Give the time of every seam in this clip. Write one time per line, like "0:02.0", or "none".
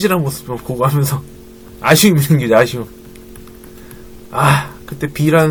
none